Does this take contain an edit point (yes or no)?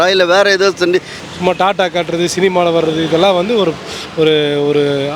yes